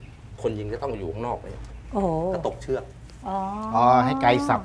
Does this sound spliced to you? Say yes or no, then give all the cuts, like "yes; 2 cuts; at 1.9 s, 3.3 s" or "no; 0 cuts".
no; 0 cuts